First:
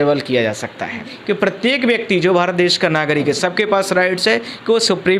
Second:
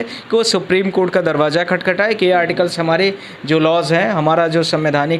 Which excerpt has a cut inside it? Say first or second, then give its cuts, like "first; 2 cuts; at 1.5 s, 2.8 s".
first; 1 cut; at 1.1 s